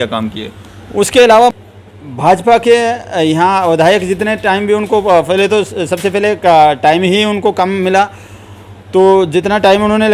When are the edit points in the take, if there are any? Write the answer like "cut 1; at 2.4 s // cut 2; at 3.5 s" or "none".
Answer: cut 1; at 1.5 s

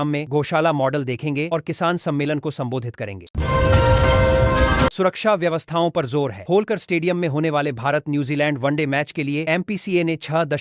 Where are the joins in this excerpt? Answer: cut 1; at 3.3 s // cut 2; at 4.9 s

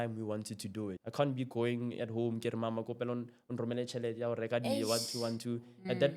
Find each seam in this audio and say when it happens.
cut 1; at 1.0 s

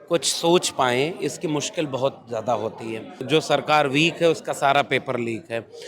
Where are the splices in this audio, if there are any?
cut 1; at 3.2 s

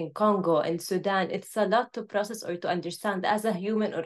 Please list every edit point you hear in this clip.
none

